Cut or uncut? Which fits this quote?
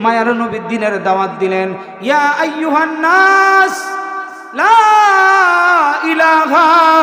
cut